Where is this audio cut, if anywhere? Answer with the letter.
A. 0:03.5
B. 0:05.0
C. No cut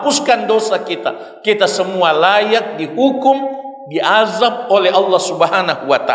C